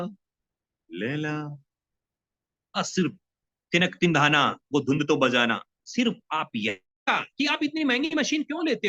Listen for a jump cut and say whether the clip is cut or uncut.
cut